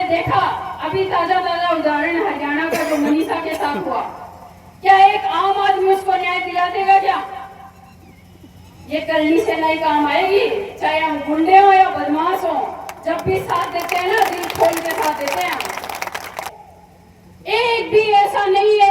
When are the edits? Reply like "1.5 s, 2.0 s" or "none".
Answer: 16.4 s